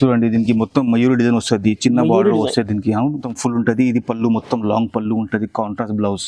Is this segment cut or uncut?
cut